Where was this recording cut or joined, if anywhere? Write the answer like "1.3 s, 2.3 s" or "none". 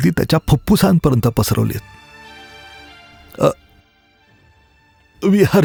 none